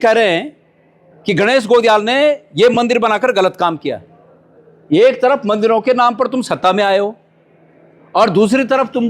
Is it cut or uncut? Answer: uncut